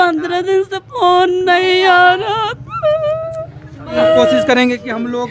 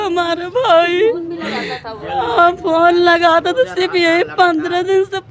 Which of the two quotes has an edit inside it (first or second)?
first